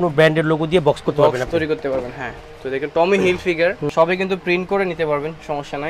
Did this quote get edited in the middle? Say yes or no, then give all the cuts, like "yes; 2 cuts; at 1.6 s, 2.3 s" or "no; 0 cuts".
no; 0 cuts